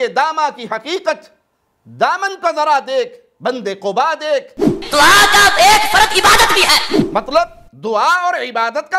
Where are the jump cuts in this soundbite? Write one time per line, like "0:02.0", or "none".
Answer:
0:04.7